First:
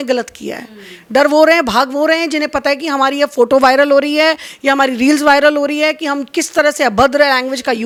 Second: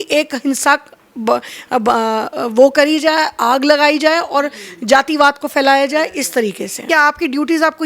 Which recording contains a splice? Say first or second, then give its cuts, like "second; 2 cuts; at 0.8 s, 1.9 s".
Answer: second; 1 cut; at 6.9 s